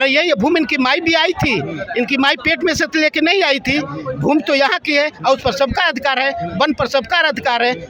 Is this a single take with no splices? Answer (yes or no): yes